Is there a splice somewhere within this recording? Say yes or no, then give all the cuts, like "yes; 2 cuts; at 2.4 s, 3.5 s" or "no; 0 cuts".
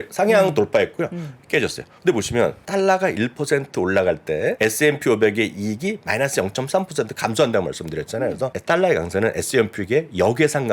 yes; 3 cuts; at 2.6 s, 4.6 s, 8.5 s